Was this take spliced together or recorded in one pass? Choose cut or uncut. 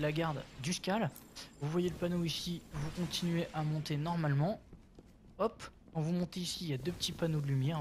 cut